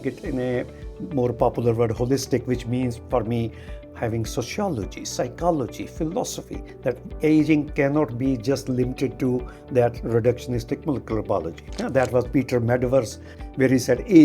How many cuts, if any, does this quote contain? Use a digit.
2